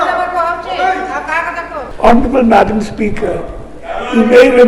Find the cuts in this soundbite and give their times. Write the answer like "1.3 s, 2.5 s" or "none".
1.8 s